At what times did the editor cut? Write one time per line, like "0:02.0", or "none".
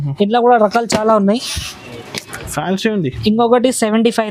none